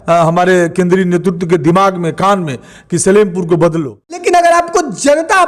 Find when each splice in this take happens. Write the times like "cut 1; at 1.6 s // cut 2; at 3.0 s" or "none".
cut 1; at 4.2 s